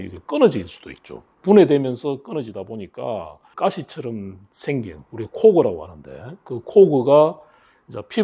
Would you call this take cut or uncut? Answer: uncut